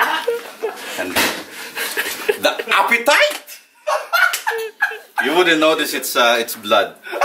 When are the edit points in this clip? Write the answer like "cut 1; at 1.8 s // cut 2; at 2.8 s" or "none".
none

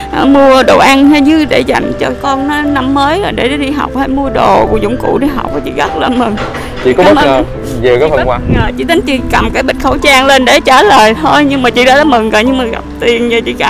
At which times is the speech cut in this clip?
none

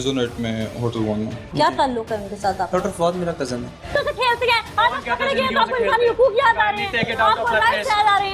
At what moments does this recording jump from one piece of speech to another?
cut 1; at 1.4 s // cut 2; at 4.0 s

